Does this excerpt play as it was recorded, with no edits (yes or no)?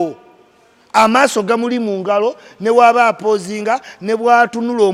yes